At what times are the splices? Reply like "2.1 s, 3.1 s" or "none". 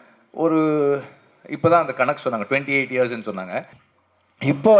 3.8 s